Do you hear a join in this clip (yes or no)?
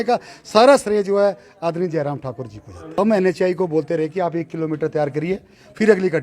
yes